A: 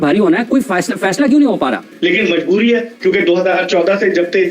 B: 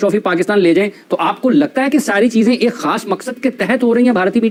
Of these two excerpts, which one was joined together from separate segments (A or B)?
A